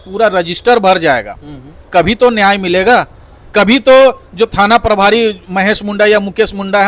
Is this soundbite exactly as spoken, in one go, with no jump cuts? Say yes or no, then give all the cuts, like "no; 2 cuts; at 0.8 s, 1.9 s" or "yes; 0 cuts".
yes; 0 cuts